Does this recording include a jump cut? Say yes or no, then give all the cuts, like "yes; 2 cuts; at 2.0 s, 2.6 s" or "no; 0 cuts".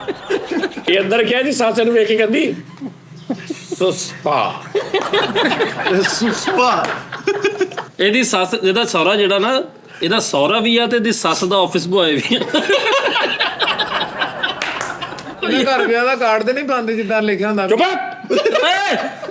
yes; 3 cuts; at 0.8 s, 7.8 s, 15.4 s